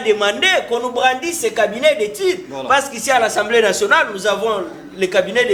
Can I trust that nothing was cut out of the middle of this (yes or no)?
yes